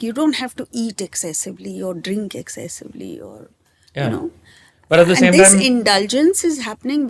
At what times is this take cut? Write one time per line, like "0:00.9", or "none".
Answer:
none